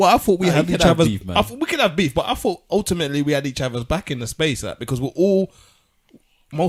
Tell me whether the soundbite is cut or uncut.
uncut